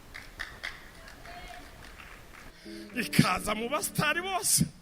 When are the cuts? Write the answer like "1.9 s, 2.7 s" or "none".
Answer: 2.5 s